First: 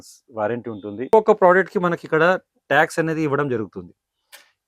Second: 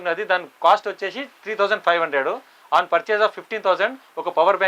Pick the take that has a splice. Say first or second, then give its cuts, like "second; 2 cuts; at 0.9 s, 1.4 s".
first; 1 cut; at 1.1 s